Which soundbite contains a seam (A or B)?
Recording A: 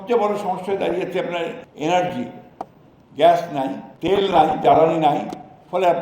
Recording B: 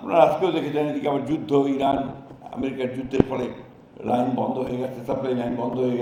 A